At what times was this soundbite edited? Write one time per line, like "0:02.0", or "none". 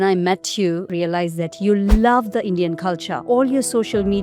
0:00.9
0:03.1